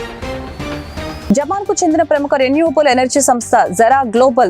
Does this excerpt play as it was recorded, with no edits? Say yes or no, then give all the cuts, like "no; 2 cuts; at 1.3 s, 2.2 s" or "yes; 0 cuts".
yes; 0 cuts